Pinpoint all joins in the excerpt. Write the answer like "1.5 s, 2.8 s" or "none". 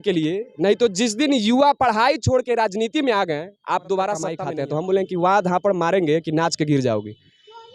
4.4 s